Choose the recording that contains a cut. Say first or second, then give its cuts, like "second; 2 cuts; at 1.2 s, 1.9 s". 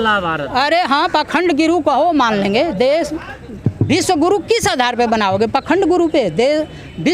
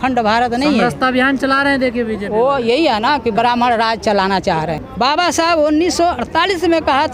second; 1 cut; at 4.8 s